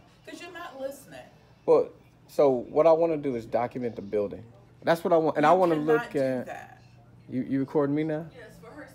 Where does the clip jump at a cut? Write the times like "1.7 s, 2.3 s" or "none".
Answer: none